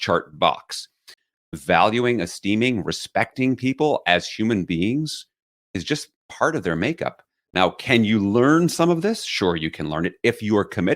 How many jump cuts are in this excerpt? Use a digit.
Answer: 1